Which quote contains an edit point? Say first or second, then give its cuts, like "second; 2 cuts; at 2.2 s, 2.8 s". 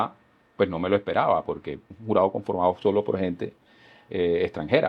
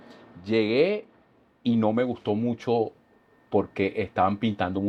first; 1 cut; at 1.9 s